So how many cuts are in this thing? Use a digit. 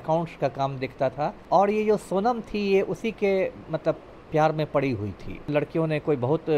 2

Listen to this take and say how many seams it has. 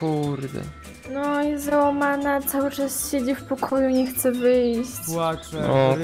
0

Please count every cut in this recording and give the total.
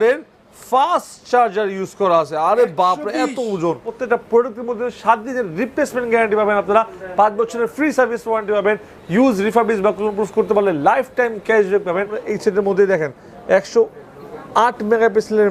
2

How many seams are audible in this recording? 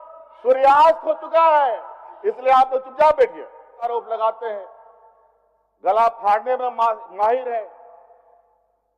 1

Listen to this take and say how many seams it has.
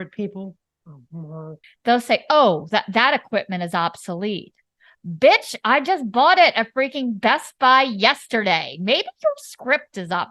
1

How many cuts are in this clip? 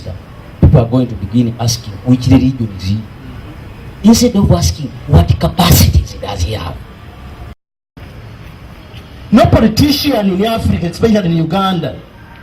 1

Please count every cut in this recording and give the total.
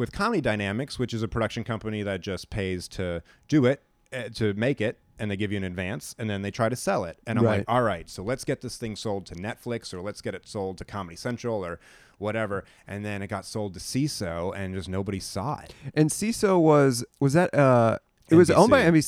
0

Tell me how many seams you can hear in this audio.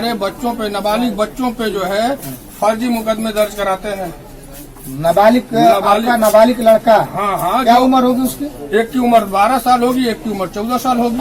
0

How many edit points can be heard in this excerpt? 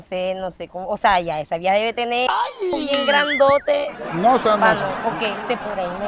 0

